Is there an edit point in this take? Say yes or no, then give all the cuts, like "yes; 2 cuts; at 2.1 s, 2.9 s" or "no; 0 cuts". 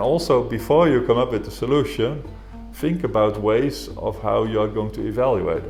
no; 0 cuts